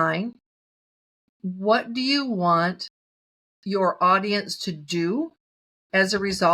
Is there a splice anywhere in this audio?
no; 0 cuts

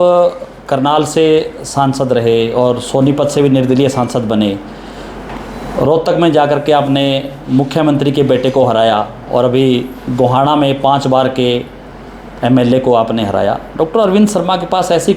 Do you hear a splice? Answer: no; 0 cuts

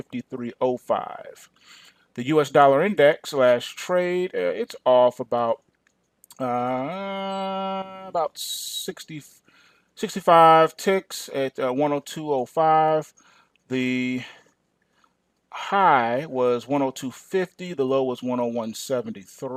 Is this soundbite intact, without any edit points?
yes; 0 cuts

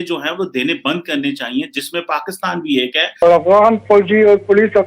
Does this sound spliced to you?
yes; 1 cut; at 3.2 s

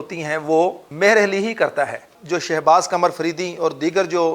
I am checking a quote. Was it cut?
yes; 2 cuts; at 0.9 s, 2.1 s

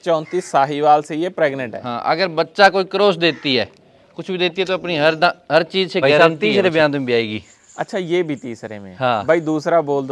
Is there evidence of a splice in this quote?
yes; 1 cut; at 6.2 s

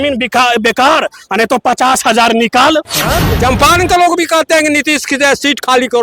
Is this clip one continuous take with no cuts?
no; 1 cut; at 3.3 s

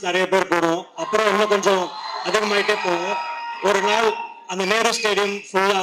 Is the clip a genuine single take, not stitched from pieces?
yes; 0 cuts

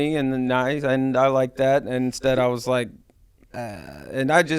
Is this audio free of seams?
yes; 0 cuts

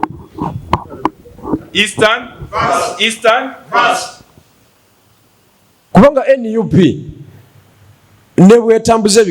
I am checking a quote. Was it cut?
yes; 1 cut; at 5.9 s

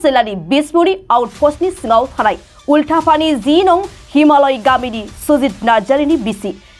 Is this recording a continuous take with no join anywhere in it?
yes; 0 cuts

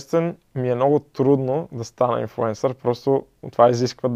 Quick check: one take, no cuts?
yes; 0 cuts

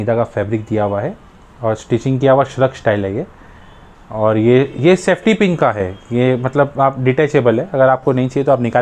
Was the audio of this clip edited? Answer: no; 0 cuts

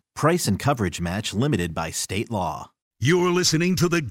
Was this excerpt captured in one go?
no; 1 cut; at 2.9 s

